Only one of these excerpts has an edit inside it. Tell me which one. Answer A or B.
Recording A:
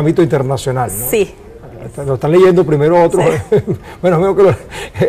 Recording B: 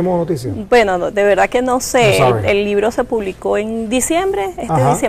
A